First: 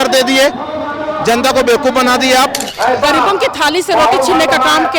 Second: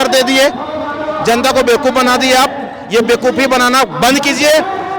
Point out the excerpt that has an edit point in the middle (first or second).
first